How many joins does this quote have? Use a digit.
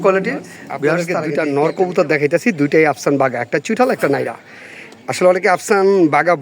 1